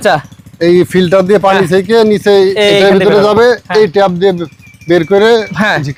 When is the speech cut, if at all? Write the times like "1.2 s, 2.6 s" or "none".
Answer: none